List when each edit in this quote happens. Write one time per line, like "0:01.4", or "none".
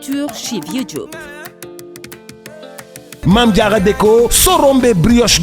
0:03.2